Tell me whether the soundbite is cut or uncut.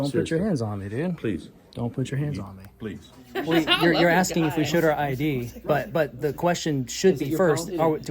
cut